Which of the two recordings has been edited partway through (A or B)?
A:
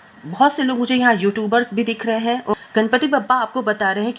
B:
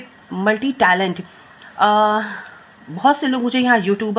A